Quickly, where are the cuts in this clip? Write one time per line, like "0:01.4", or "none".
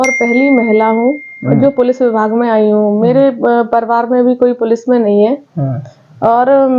none